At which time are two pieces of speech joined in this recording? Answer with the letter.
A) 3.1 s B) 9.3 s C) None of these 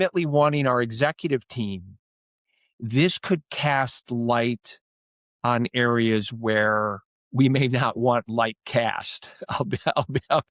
C